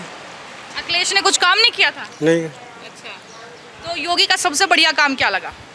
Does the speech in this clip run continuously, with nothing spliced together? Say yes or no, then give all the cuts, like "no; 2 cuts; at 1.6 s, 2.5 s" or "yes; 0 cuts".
yes; 0 cuts